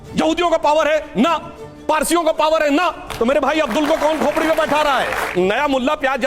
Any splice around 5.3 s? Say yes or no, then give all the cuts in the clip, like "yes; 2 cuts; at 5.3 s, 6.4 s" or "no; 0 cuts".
yes; 1 cut; at 5.3 s